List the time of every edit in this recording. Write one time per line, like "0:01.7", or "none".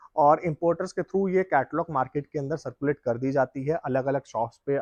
none